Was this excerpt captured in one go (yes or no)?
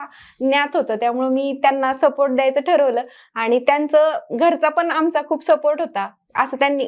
yes